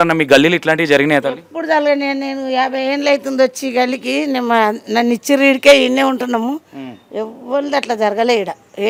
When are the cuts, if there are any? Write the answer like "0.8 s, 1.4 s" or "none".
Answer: none